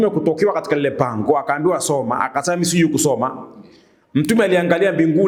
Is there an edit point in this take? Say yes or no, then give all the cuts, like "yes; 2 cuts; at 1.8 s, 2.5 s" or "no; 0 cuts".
no; 0 cuts